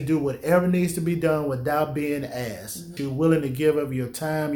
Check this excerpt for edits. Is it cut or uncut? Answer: cut